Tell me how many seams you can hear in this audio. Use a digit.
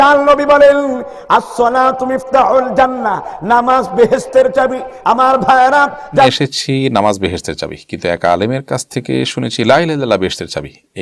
1